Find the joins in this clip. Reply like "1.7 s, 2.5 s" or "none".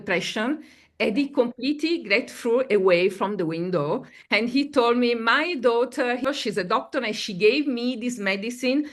6.2 s